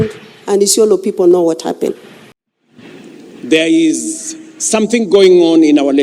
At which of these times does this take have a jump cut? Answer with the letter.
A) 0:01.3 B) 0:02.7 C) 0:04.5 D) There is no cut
B